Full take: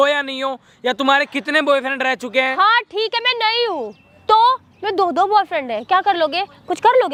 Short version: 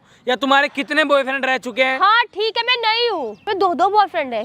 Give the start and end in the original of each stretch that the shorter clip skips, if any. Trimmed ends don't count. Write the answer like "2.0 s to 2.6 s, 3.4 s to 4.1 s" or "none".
3.9 s to 4.7 s